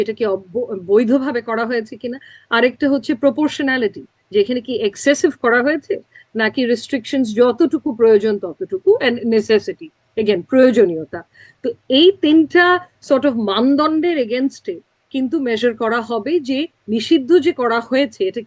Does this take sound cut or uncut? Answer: uncut